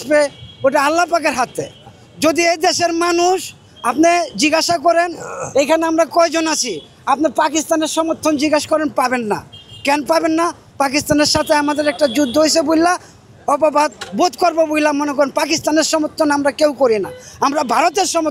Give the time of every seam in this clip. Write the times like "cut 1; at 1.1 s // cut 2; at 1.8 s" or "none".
none